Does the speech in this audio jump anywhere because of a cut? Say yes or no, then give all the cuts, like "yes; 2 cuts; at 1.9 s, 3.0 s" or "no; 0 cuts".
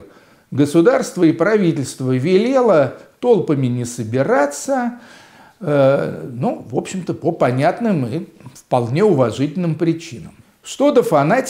no; 0 cuts